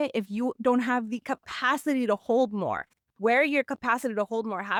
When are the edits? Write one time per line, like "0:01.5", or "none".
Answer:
none